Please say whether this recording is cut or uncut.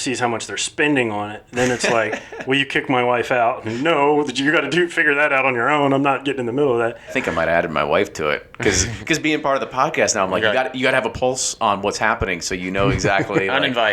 cut